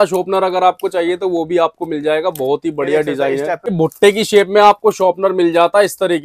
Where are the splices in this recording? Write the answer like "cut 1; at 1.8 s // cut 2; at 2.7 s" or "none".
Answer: cut 1; at 3.7 s